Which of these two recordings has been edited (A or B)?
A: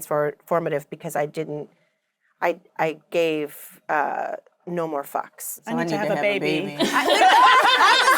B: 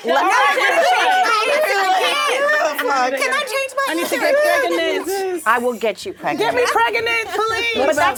A